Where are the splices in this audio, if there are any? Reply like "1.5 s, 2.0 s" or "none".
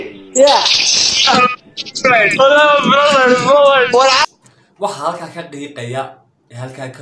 4.2 s

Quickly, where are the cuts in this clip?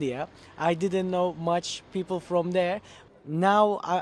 2.9 s

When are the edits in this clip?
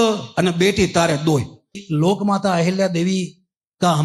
1.8 s

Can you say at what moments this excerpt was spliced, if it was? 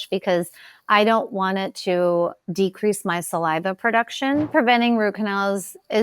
4.5 s

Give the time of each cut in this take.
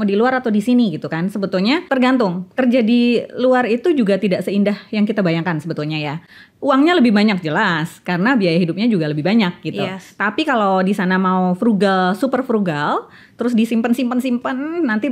1.9 s

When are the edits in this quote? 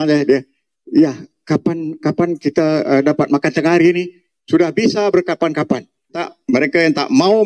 6.2 s

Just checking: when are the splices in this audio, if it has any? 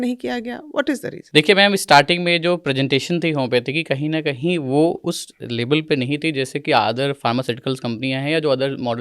1.1 s

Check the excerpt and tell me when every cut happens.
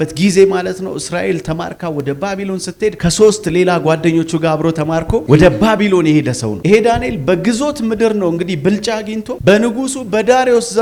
none

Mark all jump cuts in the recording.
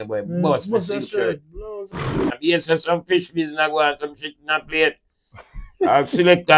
2.2 s

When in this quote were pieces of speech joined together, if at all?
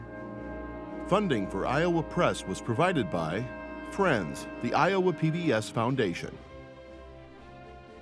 1.1 s

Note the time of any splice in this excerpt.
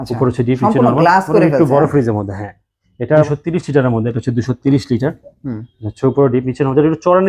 3.3 s

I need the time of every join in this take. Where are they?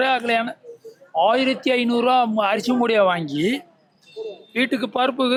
none

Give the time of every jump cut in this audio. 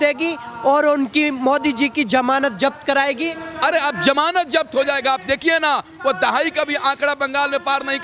3.3 s

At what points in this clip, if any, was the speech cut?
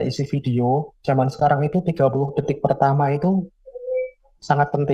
0.9 s

